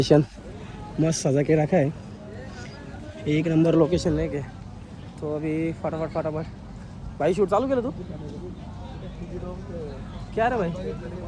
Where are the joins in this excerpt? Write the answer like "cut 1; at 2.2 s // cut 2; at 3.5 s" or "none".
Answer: none